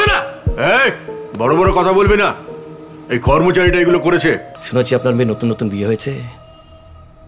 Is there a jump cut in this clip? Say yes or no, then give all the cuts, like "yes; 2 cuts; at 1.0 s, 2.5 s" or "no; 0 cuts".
yes; 1 cut; at 4.5 s